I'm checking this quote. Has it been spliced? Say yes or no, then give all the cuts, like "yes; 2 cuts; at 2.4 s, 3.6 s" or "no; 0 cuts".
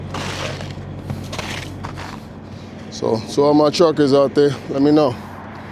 yes; 1 cut; at 2.2 s